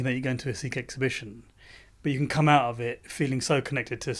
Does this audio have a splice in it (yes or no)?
no